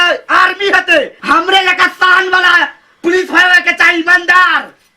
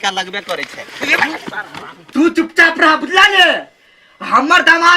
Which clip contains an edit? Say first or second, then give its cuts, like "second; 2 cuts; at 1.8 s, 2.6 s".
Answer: second; 1 cut; at 2.0 s